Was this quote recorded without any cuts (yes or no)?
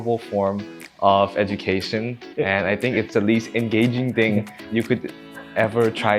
yes